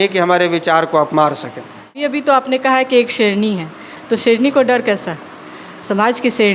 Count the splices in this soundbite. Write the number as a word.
one